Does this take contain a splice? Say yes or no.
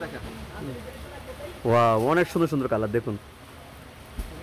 no